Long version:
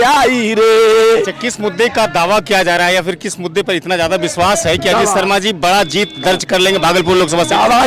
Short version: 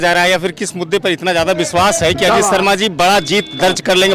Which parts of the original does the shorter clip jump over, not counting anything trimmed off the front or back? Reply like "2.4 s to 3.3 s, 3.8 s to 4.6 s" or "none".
none